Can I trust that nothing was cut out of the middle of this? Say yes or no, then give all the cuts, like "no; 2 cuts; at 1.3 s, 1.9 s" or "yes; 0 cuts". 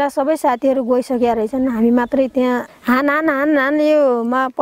no; 1 cut; at 2.7 s